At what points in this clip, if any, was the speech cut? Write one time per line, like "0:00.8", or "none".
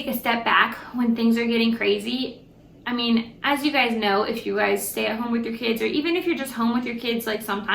none